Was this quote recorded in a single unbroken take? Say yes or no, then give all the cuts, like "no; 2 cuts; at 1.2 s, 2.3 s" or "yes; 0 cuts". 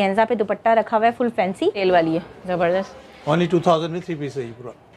no; 1 cut; at 1.8 s